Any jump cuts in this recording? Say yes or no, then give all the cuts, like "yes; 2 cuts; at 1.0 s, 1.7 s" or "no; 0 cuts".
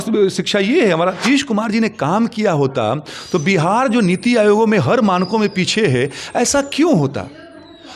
yes; 1 cut; at 1.2 s